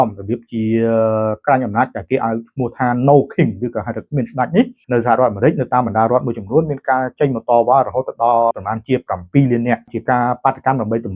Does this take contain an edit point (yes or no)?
yes